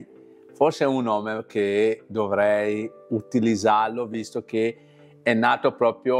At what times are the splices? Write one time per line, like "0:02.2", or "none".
none